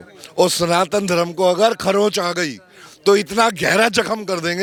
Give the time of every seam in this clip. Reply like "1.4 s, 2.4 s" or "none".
none

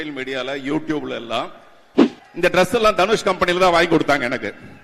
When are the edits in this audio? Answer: 2.1 s

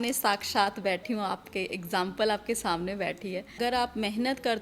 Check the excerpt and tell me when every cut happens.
3.6 s

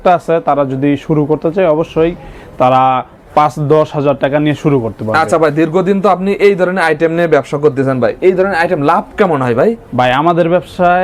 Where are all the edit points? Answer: none

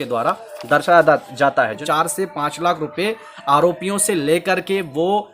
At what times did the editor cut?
1.8 s

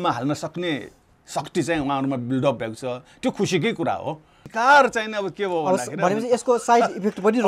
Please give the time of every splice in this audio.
4.4 s

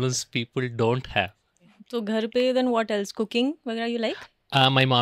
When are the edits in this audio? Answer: 1.7 s

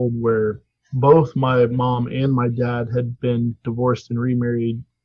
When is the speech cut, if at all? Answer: 3.6 s

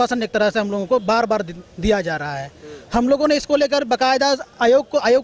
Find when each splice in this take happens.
none

